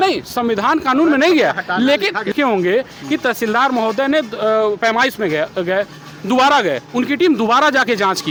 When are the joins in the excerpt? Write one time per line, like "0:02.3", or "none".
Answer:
none